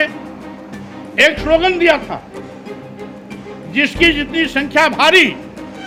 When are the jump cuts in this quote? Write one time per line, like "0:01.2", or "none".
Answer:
none